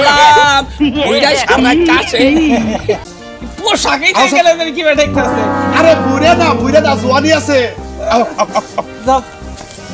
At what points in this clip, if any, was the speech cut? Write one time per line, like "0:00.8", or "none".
0:03.2